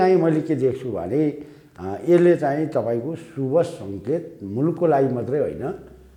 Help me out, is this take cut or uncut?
uncut